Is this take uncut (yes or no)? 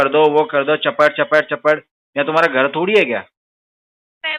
yes